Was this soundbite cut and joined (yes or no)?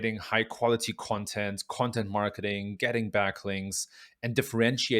no